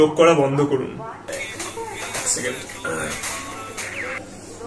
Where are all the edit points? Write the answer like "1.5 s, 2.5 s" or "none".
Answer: none